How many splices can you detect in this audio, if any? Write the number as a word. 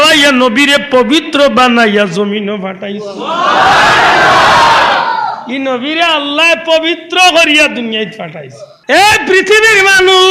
one